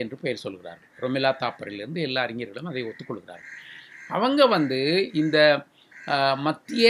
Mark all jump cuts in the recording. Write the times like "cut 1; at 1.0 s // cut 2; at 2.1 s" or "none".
none

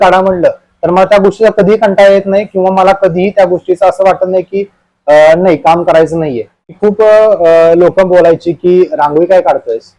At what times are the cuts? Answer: cut 1; at 6.8 s

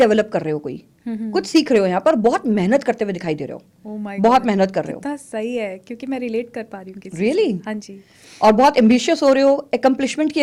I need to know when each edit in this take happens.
none

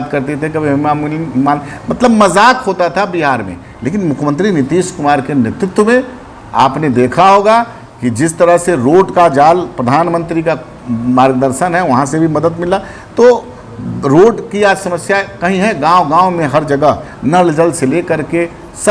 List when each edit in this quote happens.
none

